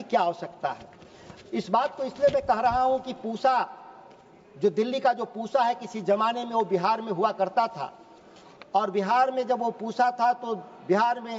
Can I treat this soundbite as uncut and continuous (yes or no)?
yes